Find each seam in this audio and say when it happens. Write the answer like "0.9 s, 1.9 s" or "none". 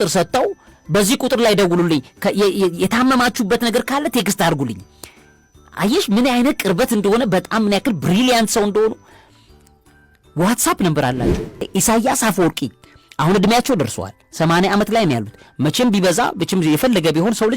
11.6 s

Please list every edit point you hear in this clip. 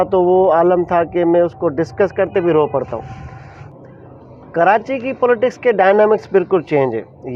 3.7 s

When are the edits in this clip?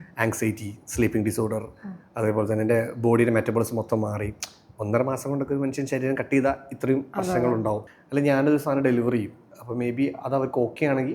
7.9 s

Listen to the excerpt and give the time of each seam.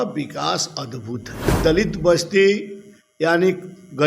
1.6 s

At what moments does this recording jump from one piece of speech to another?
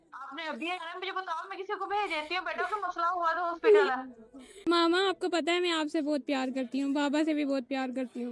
4.6 s

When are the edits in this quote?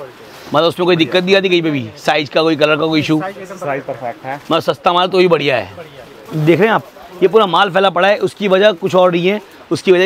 6.3 s

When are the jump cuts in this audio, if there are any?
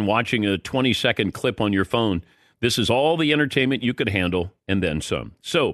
none

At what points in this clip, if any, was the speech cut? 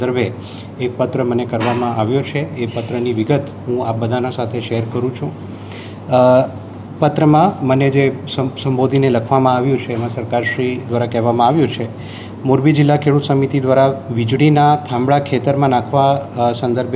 none

